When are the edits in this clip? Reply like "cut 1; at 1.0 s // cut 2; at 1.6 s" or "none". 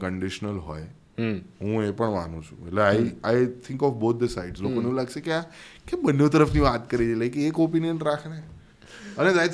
none